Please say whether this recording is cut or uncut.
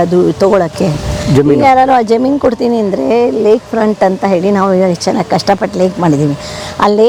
uncut